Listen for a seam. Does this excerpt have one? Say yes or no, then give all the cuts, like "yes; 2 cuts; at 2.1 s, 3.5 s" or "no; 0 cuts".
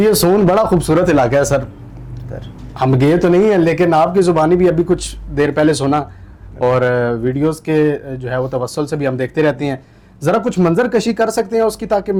no; 0 cuts